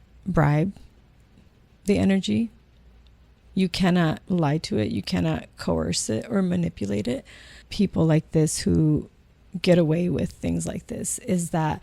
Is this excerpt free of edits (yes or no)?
no